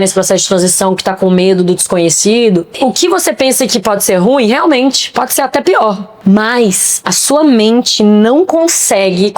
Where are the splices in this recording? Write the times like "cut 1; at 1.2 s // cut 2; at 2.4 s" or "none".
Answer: cut 1; at 2.8 s // cut 2; at 6.1 s